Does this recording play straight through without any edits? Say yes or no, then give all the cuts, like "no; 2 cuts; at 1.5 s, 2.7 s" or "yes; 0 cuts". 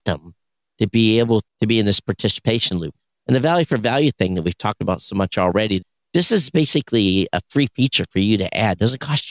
no; 3 cuts; at 1.5 s, 2.9 s, 5.8 s